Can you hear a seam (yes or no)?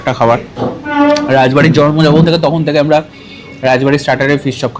no